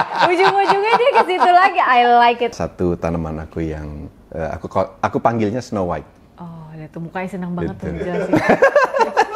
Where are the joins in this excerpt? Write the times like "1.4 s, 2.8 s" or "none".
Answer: 2.5 s

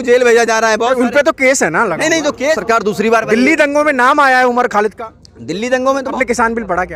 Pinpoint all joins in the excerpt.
2.6 s, 6.1 s

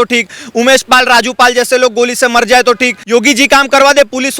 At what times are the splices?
3.0 s

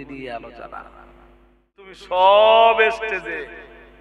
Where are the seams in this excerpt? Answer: 2.0 s

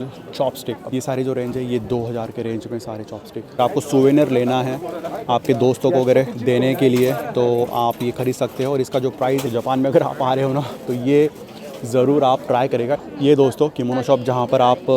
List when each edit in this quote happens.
0.8 s, 3.6 s, 9.4 s, 12.9 s

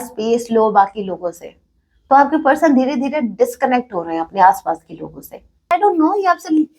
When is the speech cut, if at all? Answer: 5.7 s

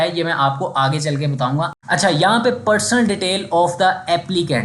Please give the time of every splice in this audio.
1.8 s

